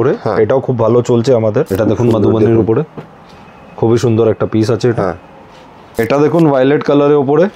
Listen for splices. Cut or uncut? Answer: cut